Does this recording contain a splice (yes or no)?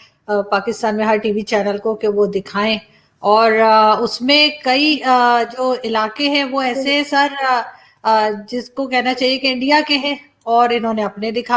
no